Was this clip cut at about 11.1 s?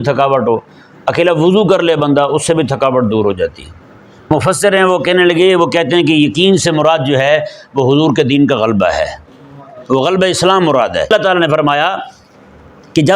yes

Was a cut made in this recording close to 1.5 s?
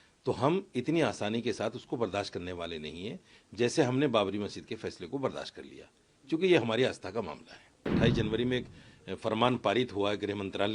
no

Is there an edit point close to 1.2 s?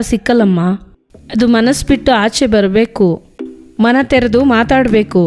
no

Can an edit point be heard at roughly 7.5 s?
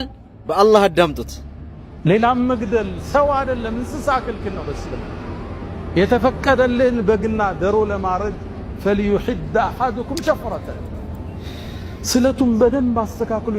no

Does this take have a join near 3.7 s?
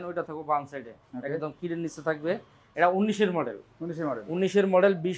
no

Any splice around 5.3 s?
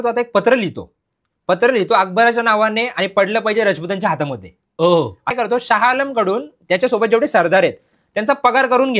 yes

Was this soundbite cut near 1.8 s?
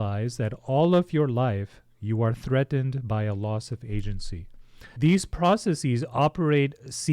no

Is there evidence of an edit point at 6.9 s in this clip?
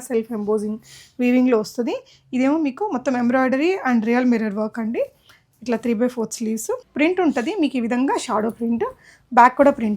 yes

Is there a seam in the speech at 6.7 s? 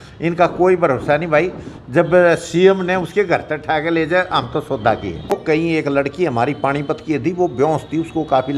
no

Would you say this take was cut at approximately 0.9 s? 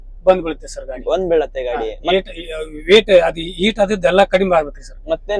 no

